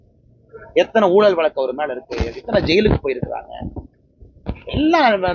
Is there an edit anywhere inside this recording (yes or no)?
no